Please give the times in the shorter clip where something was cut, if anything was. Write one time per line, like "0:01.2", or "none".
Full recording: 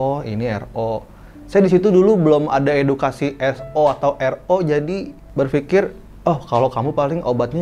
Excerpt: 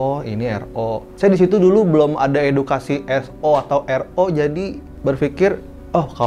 0:01.1